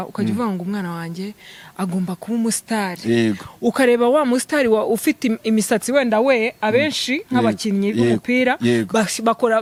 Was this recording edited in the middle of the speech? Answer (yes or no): no